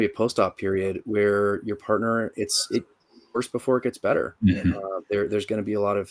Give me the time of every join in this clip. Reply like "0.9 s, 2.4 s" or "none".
none